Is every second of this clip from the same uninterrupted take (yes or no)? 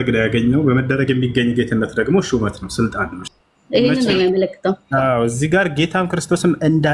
no